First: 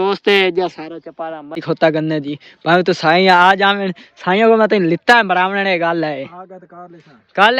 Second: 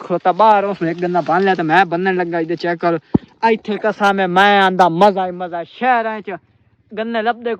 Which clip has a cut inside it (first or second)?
first